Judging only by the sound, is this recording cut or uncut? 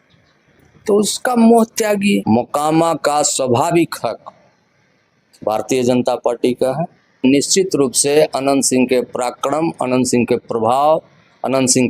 cut